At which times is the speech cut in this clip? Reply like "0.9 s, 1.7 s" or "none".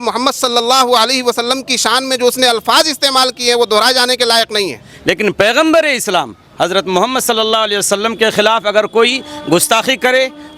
4.9 s